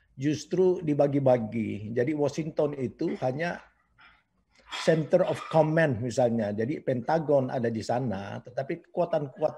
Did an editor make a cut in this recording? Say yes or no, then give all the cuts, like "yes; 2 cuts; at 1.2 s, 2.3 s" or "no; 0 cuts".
no; 0 cuts